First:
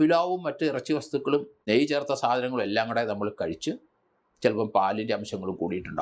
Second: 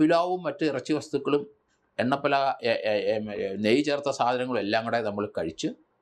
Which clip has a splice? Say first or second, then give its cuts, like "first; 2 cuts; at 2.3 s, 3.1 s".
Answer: first; 1 cut; at 1.6 s